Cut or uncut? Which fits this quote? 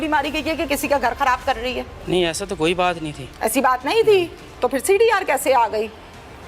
cut